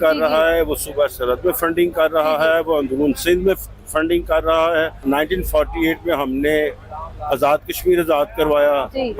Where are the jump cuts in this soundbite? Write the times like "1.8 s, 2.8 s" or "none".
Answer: 5.0 s